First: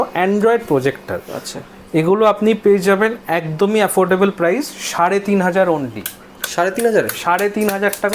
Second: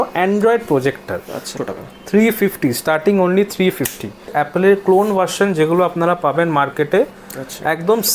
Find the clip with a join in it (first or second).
second